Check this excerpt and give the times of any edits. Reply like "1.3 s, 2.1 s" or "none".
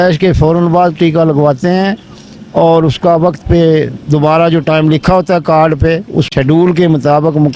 6.3 s